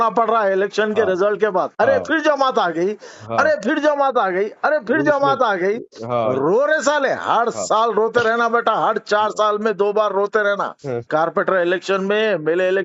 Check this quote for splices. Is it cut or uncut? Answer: uncut